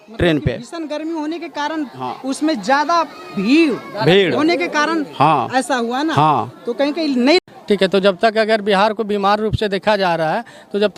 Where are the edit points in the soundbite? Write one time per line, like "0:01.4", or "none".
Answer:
0:07.4